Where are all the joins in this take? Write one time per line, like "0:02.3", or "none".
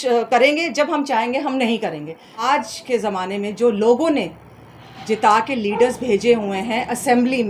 0:02.4